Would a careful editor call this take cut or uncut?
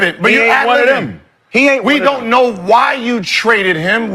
uncut